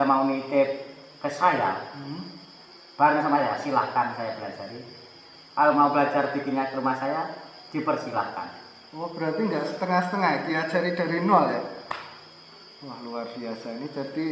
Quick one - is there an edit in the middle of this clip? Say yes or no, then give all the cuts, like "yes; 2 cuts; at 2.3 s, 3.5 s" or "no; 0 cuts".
no; 0 cuts